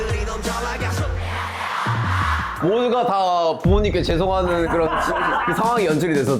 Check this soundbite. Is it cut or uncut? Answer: cut